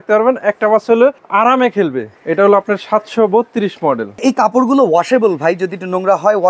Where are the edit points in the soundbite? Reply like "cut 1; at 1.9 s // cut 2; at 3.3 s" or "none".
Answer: cut 1; at 1.2 s // cut 2; at 2.1 s // cut 3; at 4.2 s